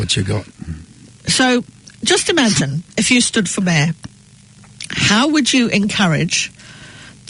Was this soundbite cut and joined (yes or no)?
no